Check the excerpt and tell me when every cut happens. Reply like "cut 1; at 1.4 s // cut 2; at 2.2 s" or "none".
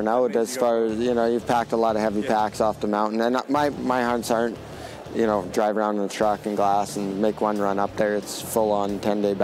none